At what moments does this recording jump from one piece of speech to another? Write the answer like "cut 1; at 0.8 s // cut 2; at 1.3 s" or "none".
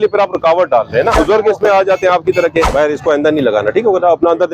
cut 1; at 1.1 s // cut 2; at 2.7 s